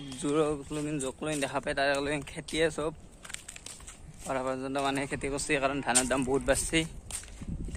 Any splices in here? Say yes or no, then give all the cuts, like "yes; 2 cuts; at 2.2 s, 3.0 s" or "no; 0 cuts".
no; 0 cuts